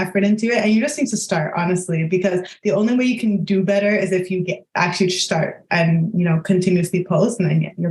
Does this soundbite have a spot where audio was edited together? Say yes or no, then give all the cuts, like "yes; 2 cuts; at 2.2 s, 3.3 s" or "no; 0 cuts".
no; 0 cuts